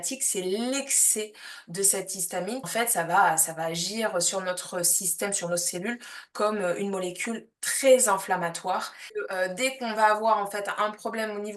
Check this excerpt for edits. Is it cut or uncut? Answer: cut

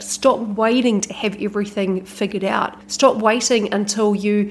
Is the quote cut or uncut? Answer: cut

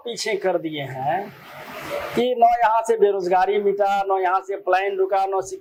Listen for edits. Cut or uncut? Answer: uncut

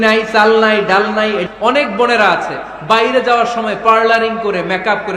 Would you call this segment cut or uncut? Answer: cut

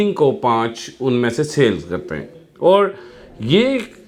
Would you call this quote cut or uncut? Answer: uncut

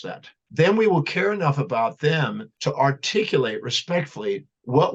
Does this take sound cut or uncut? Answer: uncut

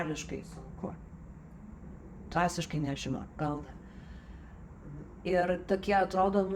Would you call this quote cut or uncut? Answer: uncut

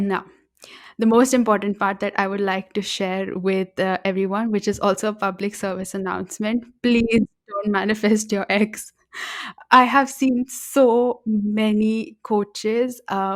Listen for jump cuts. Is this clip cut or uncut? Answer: uncut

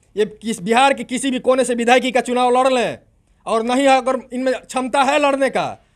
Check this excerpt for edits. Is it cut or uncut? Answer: uncut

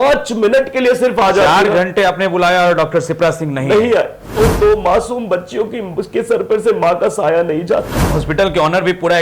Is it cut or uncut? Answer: cut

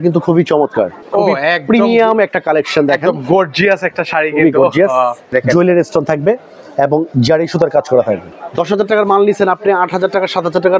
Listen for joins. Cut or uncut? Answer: cut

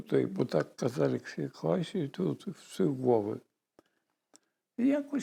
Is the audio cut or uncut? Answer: uncut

